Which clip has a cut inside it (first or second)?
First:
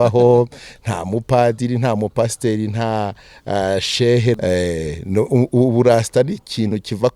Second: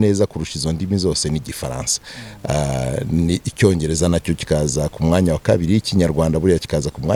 first